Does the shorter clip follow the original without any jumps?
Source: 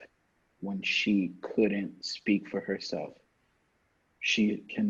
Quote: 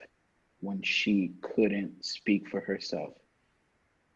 yes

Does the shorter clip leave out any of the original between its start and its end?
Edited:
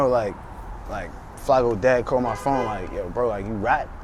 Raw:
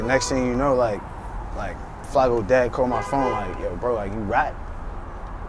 no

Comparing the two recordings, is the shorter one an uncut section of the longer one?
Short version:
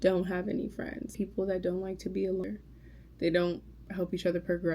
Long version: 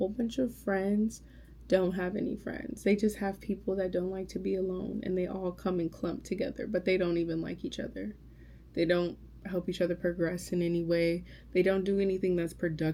no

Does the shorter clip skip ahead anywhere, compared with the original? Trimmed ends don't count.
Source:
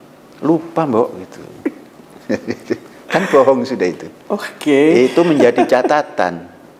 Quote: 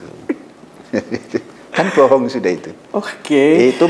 no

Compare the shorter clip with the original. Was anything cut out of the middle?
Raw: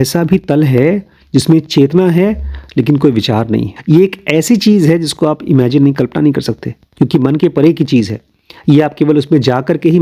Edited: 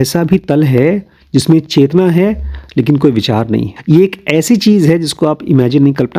no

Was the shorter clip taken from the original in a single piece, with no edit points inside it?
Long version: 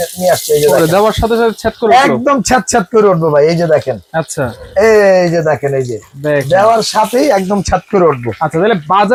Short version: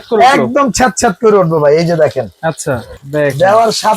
no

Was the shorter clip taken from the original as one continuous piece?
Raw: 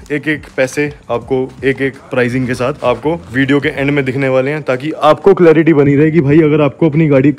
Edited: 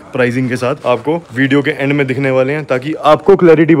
yes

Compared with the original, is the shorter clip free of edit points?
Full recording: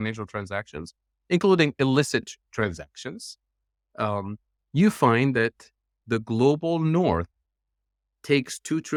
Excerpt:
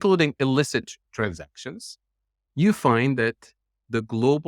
no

